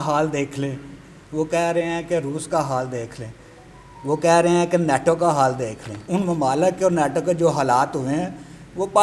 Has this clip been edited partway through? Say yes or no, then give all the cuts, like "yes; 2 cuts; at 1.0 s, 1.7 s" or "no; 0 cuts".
yes; 1 cut; at 6.0 s